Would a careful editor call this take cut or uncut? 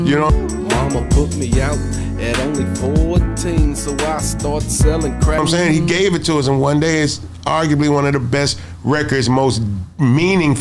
cut